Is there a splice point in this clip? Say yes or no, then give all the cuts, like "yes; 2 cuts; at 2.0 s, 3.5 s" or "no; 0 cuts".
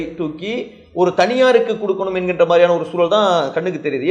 no; 0 cuts